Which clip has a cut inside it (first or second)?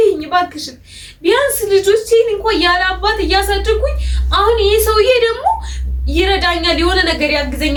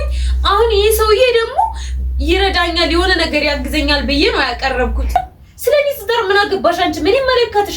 second